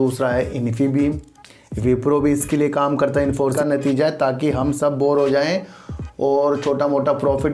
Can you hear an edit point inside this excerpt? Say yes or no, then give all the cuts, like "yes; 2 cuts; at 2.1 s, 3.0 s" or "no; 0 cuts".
yes; 1 cut; at 3.5 s